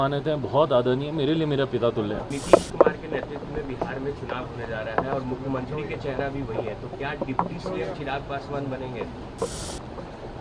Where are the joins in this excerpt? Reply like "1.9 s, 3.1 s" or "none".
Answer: 2.3 s